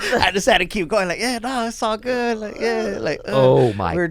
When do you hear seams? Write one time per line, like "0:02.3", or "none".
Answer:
none